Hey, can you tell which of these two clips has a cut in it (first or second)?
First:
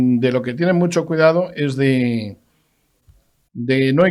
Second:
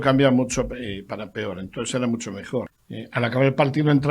second